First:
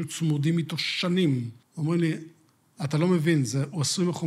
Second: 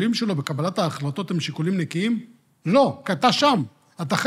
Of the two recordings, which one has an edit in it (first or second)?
first